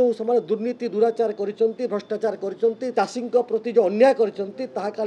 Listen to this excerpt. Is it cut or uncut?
cut